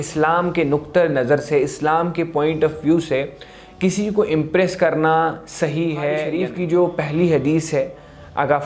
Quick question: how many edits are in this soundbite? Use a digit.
1